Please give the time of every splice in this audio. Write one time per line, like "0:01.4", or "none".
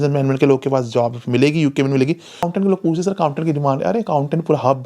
0:02.3